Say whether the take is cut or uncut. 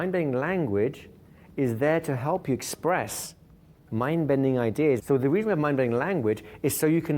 cut